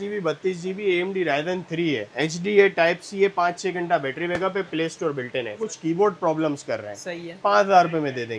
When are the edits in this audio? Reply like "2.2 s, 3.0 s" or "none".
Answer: none